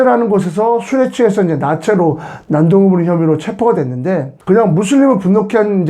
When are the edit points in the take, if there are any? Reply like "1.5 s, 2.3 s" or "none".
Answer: 4.3 s